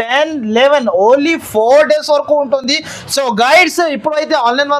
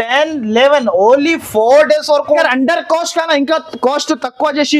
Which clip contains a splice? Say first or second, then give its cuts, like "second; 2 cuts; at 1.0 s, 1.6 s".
second; 1 cut; at 2.4 s